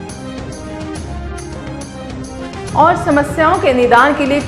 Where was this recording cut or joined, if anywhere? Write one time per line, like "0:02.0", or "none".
0:02.6

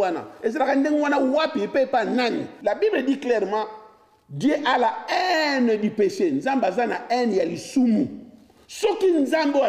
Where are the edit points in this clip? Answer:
0:02.5

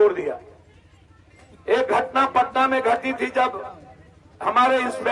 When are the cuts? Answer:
0:01.5

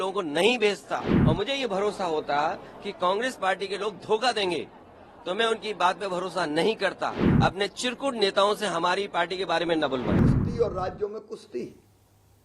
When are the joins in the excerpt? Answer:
0:01.1
0:07.2
0:10.3

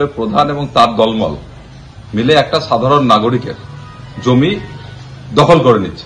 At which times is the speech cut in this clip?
none

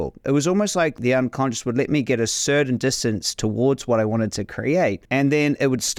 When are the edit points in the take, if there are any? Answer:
0:01.0
0:05.0

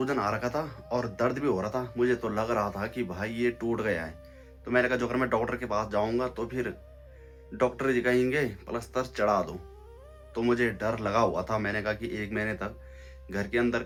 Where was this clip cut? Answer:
none

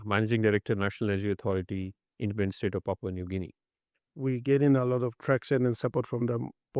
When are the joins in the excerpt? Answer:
0:04.0

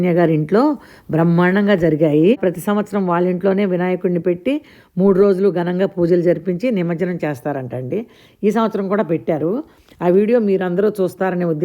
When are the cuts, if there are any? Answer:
0:02.4

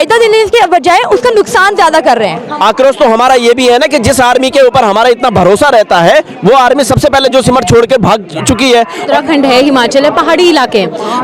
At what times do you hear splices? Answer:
0:02.4
0:09.1

